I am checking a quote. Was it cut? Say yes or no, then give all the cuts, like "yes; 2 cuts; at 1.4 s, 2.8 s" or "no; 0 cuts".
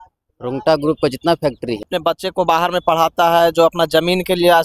yes; 1 cut; at 1.9 s